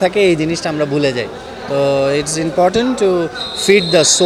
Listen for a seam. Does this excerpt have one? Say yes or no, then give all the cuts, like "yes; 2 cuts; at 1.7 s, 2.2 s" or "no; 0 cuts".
no; 0 cuts